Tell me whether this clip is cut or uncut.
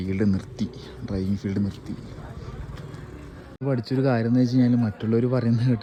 uncut